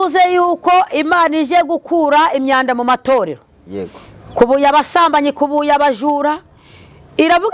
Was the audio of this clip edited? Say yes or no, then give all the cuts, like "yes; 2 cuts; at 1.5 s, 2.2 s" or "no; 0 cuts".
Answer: no; 0 cuts